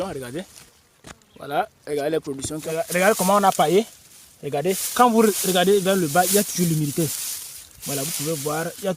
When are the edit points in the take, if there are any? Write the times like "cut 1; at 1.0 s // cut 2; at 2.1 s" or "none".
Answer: cut 1; at 2.6 s